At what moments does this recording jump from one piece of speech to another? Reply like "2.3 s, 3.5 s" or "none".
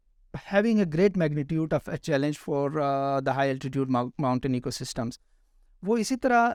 none